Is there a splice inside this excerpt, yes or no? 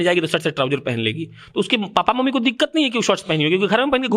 no